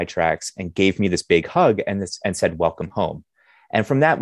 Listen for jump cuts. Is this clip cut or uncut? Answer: uncut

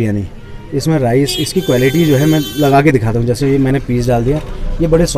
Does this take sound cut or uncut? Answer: uncut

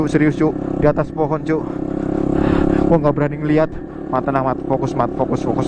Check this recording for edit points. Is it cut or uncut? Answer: uncut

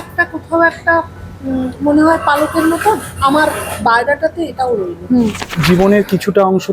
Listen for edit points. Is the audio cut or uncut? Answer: cut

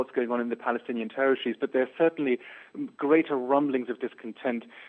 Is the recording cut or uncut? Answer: uncut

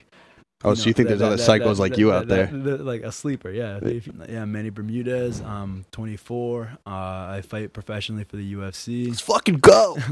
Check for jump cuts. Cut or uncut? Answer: cut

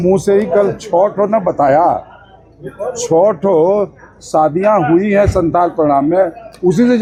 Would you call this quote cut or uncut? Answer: uncut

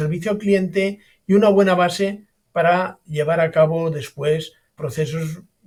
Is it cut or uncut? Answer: uncut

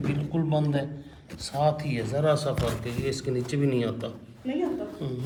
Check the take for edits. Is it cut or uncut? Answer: uncut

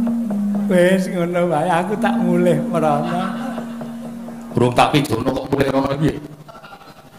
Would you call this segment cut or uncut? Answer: cut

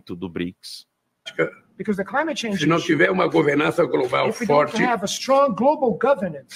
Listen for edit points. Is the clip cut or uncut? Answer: cut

